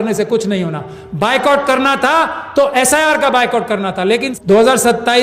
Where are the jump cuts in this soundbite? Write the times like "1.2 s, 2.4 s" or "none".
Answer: 4.3 s